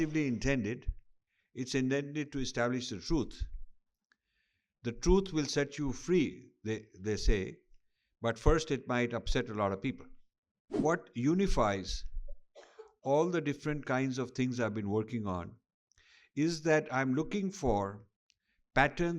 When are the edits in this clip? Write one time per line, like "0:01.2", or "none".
0:10.6

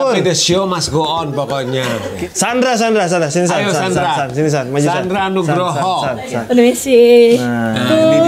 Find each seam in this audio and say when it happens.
0:02.2
0:06.4

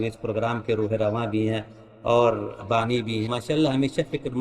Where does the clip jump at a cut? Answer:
0:03.3

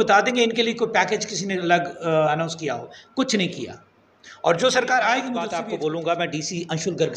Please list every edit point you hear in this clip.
0:05.5

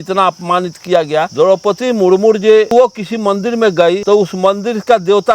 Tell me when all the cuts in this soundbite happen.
0:01.3
0:02.7
0:04.0

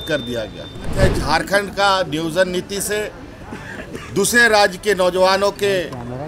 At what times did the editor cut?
0:00.9

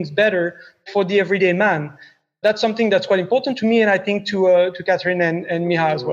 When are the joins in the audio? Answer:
0:00.9
0:02.4
0:03.5
0:04.8

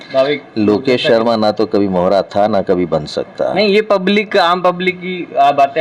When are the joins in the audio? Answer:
none

